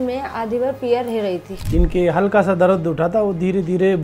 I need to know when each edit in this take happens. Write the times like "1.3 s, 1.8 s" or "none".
1.5 s